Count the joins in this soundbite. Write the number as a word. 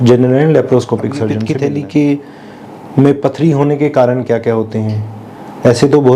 one